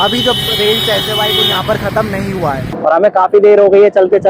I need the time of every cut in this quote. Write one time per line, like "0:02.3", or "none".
0:02.7